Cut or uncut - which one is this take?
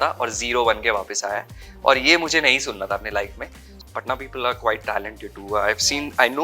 cut